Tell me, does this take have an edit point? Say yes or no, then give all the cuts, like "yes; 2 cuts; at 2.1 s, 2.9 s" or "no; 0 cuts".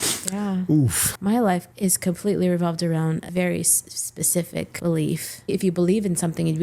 yes; 5 cuts; at 1.0 s, 1.7 s, 3.3 s, 4.7 s, 5.5 s